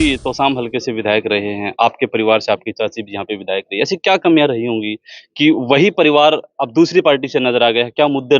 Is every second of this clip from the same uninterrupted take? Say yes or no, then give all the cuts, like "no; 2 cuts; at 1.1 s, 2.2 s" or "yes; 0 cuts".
yes; 0 cuts